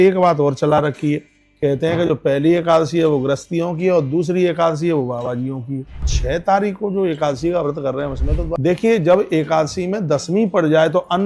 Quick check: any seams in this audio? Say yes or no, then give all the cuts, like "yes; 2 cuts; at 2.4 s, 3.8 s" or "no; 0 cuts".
yes; 2 cuts; at 6.1 s, 8.5 s